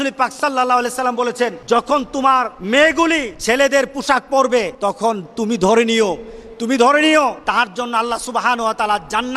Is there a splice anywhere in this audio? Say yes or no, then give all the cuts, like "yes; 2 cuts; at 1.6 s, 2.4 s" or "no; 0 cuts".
yes; 5 cuts; at 1.6 s, 2.6 s, 3.3 s, 4.7 s, 7.4 s